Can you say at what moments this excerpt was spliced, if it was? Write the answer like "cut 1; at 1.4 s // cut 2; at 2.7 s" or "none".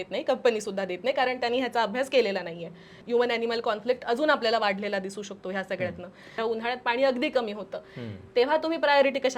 cut 1; at 3.0 s // cut 2; at 6.2 s